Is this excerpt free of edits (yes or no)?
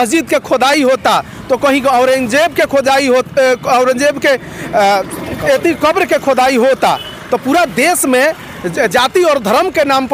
yes